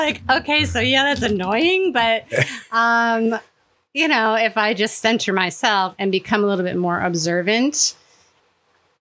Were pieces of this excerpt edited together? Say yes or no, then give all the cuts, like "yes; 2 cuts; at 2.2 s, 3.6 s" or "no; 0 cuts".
no; 0 cuts